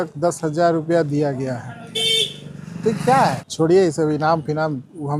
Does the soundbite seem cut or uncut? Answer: cut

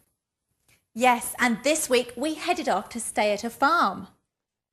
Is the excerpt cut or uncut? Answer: uncut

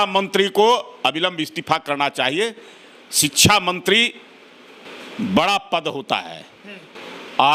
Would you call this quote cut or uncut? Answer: uncut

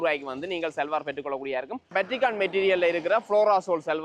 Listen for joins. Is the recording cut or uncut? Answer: cut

